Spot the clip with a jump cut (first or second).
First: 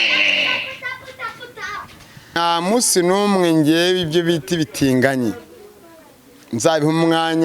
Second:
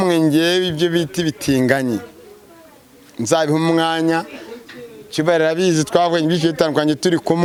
first